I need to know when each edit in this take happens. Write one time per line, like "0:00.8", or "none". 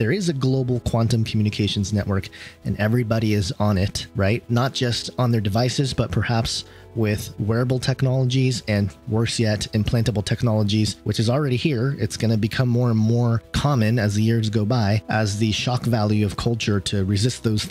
none